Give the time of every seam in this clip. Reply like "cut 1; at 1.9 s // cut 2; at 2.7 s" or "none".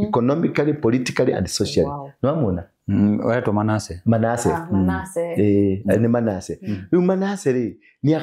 none

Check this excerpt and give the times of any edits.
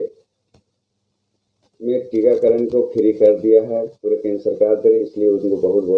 none

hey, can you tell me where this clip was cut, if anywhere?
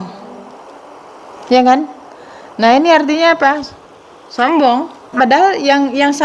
cut 1; at 5.1 s

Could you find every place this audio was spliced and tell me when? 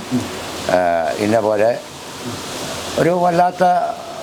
none

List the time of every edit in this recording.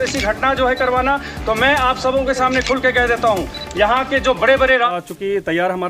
cut 1; at 4.9 s

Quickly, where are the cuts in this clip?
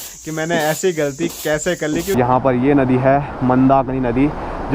cut 1; at 2.2 s

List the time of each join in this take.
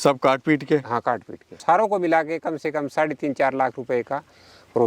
cut 1; at 1.5 s

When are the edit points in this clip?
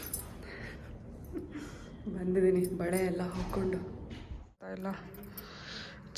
cut 1; at 4.7 s

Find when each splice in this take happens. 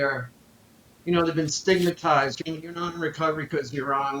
cut 1; at 2.4 s

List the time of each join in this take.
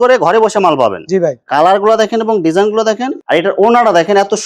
cut 1; at 3.1 s

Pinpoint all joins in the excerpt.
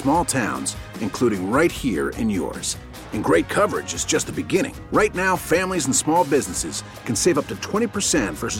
none

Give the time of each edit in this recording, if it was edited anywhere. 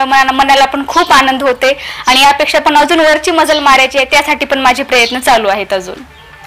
none

